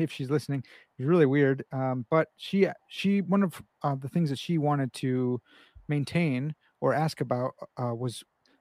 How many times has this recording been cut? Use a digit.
0